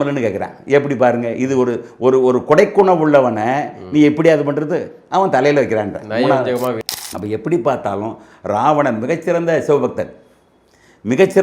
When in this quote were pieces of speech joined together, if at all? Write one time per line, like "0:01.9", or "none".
0:06.8